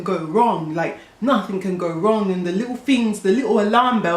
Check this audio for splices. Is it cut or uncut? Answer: uncut